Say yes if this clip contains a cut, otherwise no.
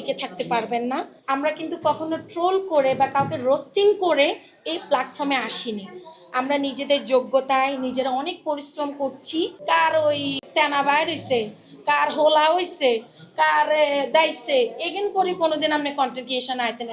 yes